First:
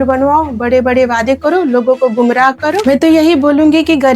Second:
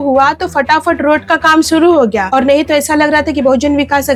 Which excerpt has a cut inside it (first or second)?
first